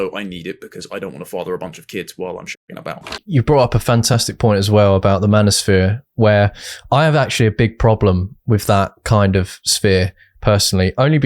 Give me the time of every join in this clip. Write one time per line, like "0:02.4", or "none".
0:03.1